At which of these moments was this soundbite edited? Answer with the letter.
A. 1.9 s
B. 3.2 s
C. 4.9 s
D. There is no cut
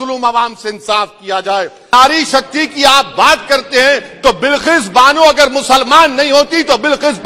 A